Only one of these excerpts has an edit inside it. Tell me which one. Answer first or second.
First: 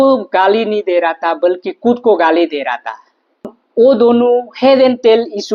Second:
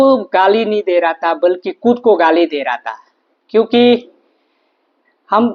first